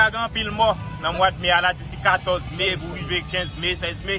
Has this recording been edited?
no; 0 cuts

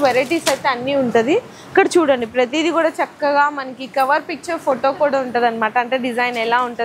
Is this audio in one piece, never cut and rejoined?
yes; 0 cuts

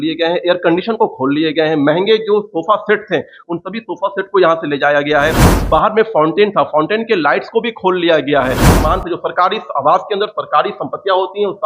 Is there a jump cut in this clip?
yes; 1 cut; at 8.7 s

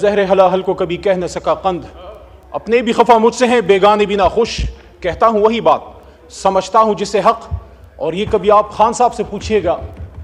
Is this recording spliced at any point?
no; 0 cuts

